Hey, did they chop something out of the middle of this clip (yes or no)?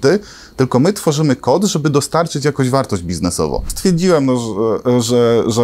yes